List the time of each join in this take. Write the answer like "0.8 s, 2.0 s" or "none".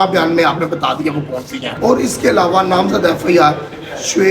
1.7 s